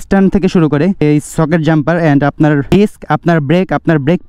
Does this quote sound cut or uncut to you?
cut